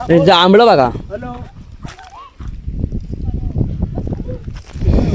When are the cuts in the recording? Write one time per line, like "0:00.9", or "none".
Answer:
none